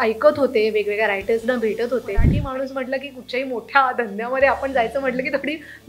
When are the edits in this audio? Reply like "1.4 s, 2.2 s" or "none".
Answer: 2.3 s